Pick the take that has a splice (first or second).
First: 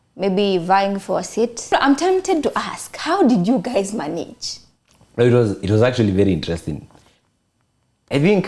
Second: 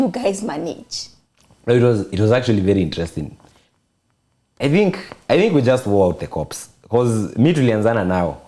first